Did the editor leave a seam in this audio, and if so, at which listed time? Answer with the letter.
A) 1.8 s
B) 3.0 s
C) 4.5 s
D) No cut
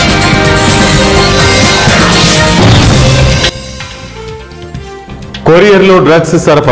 C